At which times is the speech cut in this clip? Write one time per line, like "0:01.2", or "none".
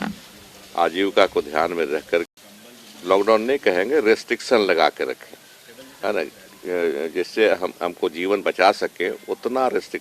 0:02.3